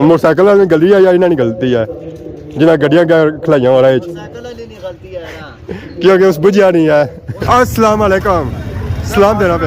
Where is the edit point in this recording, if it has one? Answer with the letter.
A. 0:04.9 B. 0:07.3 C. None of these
B